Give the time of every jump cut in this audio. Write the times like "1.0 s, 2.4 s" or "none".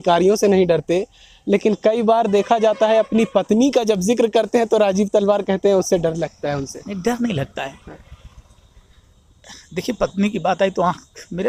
none